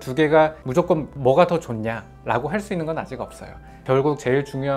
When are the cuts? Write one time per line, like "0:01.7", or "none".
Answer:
0:03.8